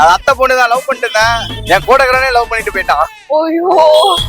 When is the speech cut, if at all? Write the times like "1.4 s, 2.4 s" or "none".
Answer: 1.5 s

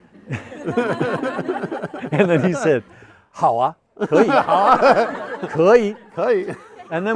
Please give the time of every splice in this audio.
none

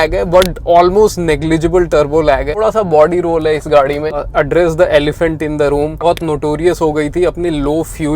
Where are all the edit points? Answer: 2.6 s, 4.1 s, 6.0 s

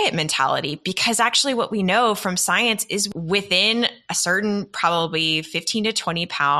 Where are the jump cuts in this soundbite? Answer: 3.1 s

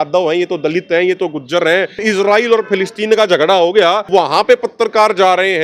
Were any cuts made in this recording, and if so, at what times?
2.0 s, 4.1 s

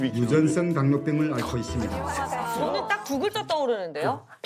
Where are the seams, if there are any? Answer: 2.0 s

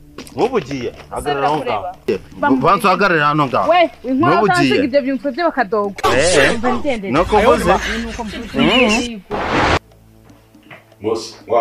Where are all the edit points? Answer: 9.5 s

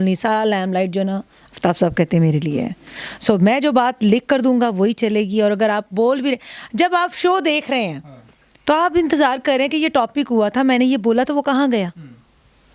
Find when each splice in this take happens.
none

